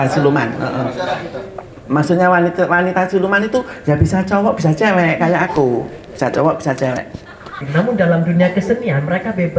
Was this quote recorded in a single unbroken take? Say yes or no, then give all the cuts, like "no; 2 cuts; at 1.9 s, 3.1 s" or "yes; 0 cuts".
no; 1 cut; at 7.6 s